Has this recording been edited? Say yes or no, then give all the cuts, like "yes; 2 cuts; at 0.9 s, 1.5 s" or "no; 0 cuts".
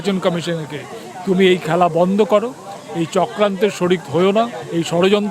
no; 0 cuts